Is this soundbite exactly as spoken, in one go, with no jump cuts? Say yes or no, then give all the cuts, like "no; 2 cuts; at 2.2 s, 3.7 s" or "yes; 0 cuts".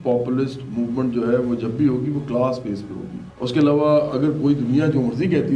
yes; 0 cuts